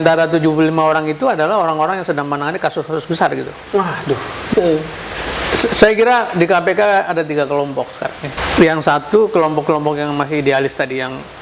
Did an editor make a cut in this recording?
yes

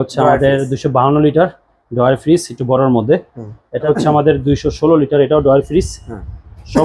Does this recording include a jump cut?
yes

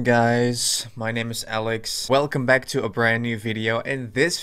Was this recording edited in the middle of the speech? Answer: yes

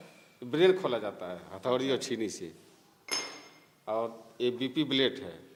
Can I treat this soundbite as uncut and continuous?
yes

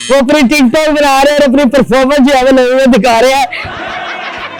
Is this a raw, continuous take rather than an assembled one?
yes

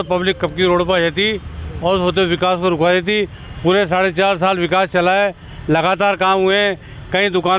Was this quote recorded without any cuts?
yes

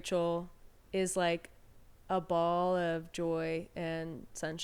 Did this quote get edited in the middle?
no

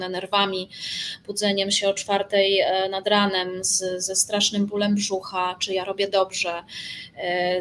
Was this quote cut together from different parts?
no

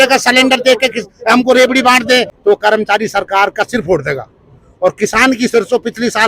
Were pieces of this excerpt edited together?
yes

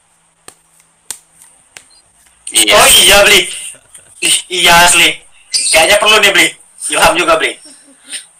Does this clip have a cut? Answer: no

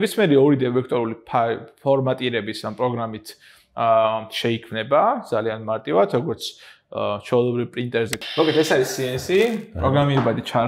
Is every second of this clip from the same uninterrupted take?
no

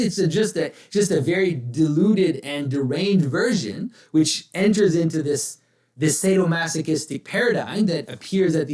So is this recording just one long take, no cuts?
yes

